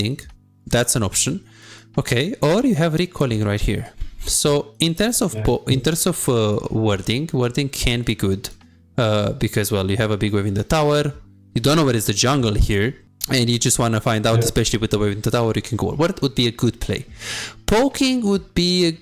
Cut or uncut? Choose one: cut